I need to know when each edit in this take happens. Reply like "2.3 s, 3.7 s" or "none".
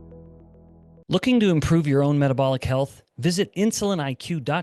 0.9 s